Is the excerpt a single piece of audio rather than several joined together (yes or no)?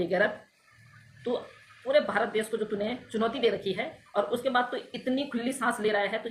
yes